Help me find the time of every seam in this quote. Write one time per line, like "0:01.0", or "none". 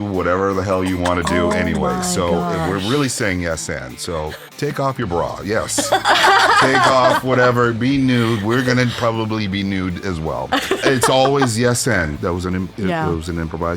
0:04.5
0:10.8
0:12.2